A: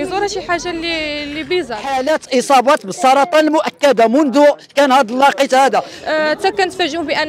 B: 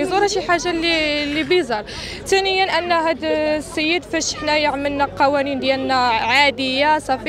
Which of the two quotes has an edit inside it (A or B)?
A